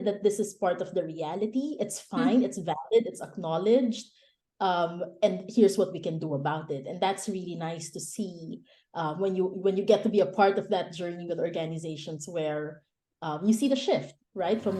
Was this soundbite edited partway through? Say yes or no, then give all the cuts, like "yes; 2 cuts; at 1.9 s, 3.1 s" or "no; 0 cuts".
no; 0 cuts